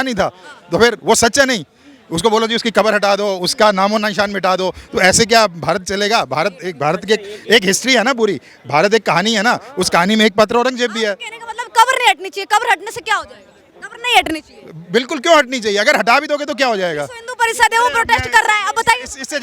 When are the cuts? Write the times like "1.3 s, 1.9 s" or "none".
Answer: none